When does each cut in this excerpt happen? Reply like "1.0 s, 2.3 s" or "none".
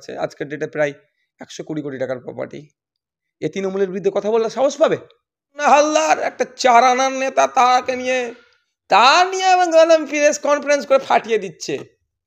5.6 s